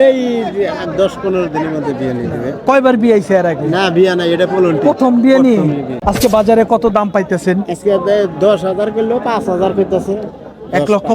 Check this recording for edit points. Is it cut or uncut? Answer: cut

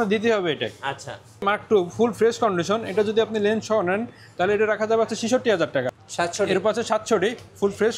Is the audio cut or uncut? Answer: cut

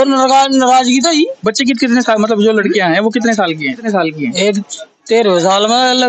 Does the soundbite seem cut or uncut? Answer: cut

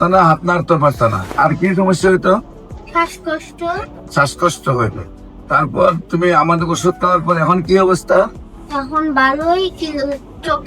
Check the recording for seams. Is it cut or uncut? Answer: cut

